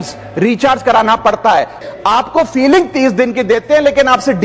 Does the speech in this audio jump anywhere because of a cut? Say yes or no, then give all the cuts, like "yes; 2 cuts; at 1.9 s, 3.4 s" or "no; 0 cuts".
yes; 1 cut; at 1.8 s